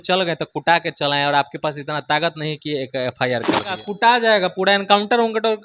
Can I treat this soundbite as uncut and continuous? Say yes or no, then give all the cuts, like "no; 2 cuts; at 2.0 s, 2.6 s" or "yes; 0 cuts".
no; 1 cut; at 3.9 s